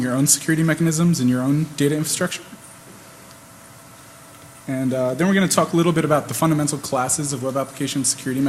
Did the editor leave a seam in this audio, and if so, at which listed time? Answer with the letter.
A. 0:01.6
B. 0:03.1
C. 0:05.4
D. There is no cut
B